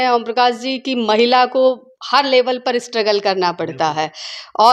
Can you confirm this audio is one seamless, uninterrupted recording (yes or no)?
yes